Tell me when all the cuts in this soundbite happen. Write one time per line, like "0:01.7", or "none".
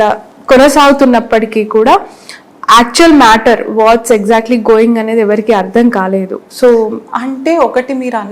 none